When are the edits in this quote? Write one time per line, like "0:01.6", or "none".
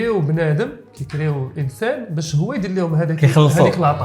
none